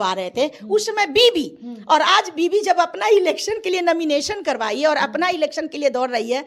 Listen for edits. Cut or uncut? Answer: uncut